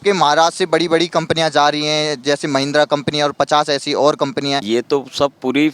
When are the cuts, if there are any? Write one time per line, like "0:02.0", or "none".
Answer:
0:04.6